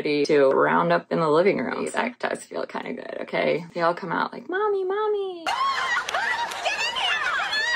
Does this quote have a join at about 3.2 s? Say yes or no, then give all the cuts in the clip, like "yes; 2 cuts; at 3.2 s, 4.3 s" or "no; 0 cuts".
no; 1 cut; at 1.9 s